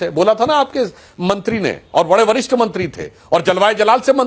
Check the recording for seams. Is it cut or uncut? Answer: uncut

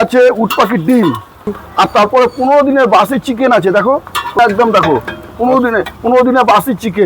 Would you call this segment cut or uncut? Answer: cut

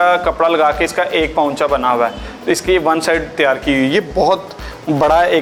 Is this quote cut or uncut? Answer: uncut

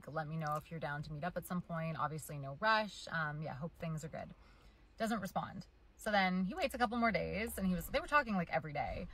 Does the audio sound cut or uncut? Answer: cut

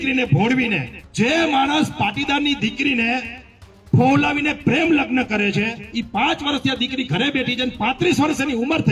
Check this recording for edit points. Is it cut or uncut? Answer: cut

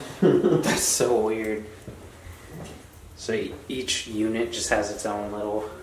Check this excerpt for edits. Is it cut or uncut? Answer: uncut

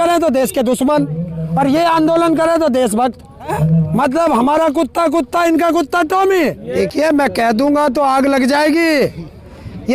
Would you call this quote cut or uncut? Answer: cut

